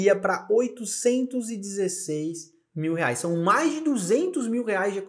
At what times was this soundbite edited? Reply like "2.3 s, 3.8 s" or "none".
none